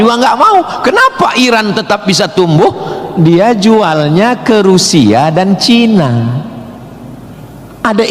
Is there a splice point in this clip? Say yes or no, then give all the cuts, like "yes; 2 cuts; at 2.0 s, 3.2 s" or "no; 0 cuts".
yes; 1 cut; at 6.1 s